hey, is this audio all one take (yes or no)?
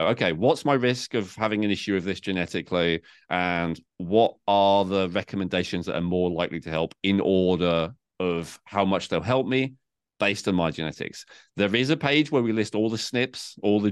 yes